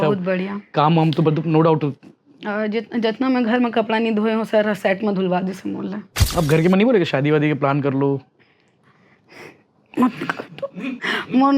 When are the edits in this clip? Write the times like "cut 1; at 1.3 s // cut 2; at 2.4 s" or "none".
cut 1; at 6.2 s